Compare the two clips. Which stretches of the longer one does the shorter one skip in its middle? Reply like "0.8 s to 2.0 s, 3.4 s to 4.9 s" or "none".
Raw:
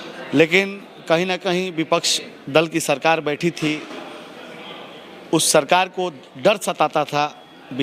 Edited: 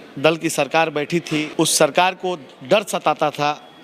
3.8 s to 5.2 s